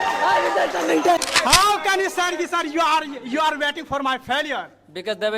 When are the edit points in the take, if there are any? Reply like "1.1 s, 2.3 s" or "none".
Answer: 1.2 s